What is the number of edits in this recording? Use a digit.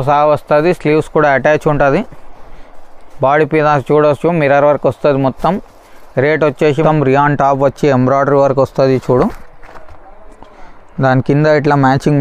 1